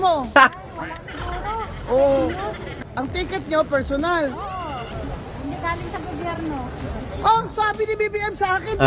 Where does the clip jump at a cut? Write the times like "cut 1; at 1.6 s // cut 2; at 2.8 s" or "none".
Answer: cut 1; at 2.8 s